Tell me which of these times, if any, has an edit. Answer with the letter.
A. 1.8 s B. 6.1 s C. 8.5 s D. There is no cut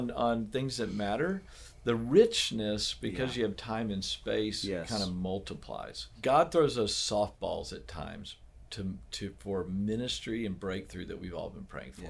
B